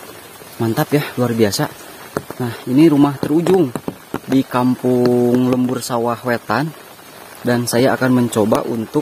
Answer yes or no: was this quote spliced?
no